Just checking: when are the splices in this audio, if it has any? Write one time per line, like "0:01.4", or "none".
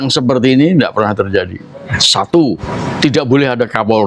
0:02.0
0:02.7